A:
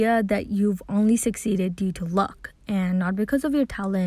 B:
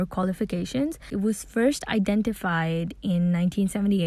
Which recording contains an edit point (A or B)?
B